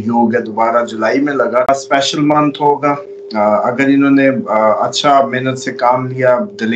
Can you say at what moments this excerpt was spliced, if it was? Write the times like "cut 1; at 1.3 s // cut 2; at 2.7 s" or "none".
cut 1; at 1.7 s